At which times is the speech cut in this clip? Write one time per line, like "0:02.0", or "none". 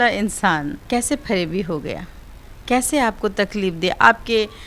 none